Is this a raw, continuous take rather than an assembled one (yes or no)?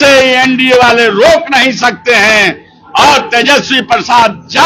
yes